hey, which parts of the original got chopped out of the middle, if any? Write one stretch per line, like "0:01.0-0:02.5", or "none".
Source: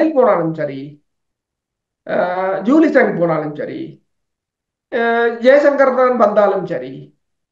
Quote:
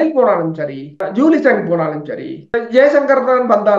0:01.0-0:02.5
0:04.0-0:05.2